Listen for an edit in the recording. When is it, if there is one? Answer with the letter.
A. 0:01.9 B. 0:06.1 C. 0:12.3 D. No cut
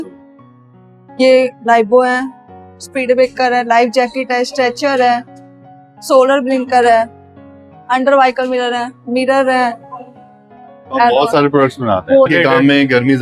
C